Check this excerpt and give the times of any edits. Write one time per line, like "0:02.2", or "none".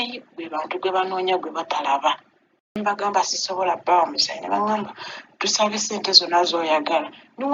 0:02.8

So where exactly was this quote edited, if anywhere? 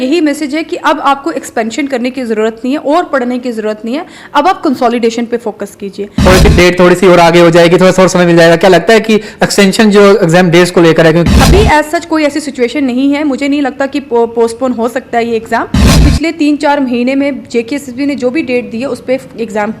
0:06.1
0:11.3
0:15.8

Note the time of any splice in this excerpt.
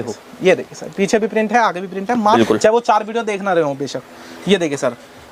0:02.4

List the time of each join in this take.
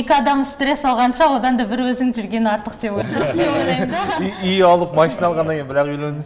0:03.0

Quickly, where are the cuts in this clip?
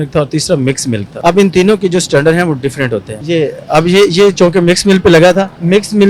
0:01.1
0:03.1

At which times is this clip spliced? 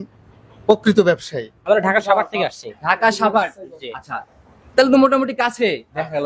0:01.5

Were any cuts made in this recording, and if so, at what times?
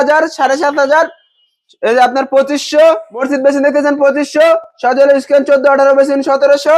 0:03.2

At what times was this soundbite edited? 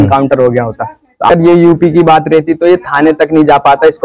0:01.3

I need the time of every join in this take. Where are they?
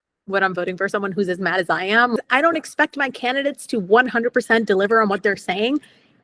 0:02.2

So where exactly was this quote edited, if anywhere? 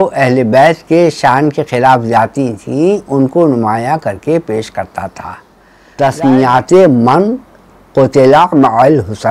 0:05.9

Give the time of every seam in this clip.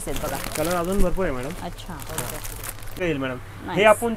0:03.0

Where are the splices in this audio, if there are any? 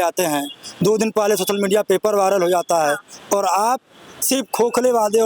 none

